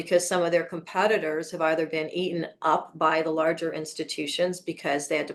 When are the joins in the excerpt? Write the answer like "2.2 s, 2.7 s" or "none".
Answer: none